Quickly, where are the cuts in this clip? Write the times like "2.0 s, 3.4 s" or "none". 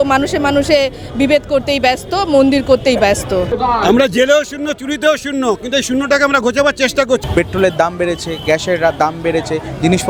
3.5 s, 7.2 s